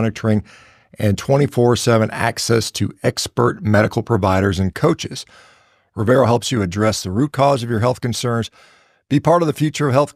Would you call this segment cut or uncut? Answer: uncut